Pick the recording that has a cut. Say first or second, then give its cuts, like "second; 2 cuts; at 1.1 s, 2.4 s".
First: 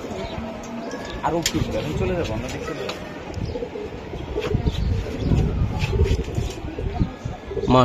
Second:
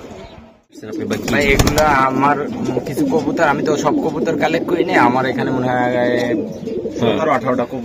second; 1 cut; at 1.0 s